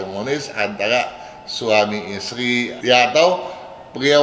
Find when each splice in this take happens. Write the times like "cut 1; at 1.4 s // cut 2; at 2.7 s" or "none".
cut 1; at 2.8 s